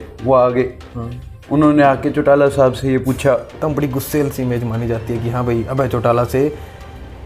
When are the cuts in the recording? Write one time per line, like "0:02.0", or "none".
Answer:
0:03.5